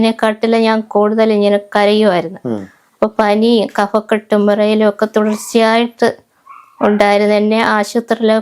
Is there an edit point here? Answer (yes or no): no